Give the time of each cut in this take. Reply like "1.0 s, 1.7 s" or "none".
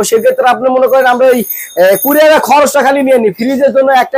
none